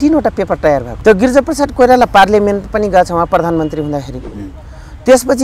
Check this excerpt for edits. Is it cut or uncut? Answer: cut